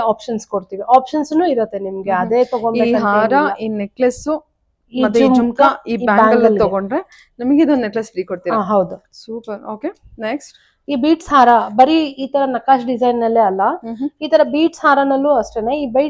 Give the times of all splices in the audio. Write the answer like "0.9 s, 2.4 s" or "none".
none

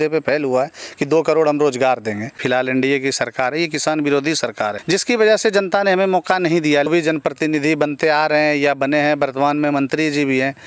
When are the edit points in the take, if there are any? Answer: 2.4 s, 4.8 s, 6.9 s

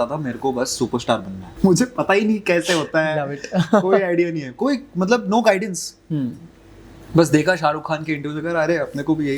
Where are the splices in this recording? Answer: 1.4 s

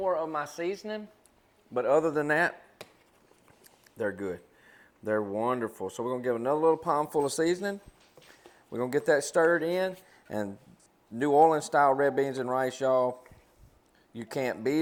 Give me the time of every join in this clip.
none

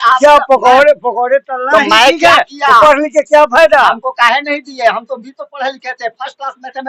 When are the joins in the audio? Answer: none

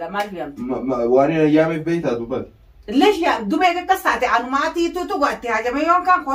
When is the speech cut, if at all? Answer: none

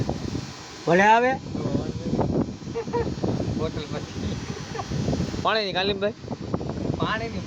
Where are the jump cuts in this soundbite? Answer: none

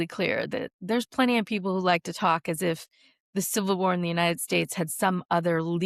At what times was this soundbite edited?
none

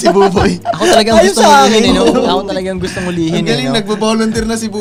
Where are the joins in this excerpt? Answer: none

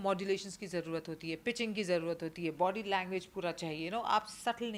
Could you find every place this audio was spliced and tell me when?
none

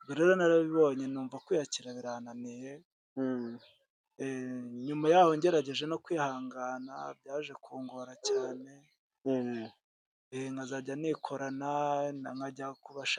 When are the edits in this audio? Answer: none

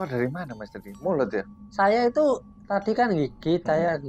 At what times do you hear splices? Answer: 1.6 s

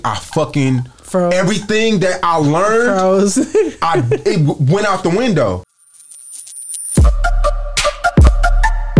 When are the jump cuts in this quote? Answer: 5.7 s

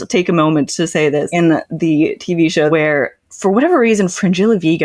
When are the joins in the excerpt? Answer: 1.1 s, 2.7 s

